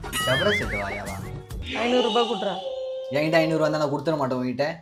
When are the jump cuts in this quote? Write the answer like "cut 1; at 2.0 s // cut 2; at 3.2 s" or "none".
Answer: none